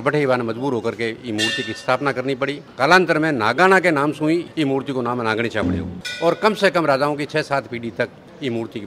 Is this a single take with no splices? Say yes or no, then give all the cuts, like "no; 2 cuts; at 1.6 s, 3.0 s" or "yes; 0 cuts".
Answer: yes; 0 cuts